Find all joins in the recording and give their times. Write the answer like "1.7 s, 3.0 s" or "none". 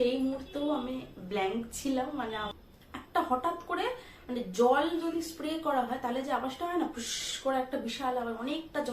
2.5 s